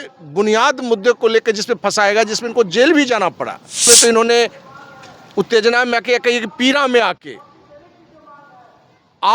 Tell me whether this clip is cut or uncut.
cut